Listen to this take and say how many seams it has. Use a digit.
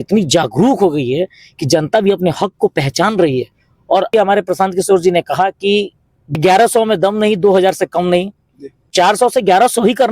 3